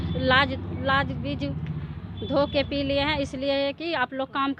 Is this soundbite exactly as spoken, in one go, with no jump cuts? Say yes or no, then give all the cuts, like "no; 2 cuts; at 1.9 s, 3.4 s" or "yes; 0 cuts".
yes; 0 cuts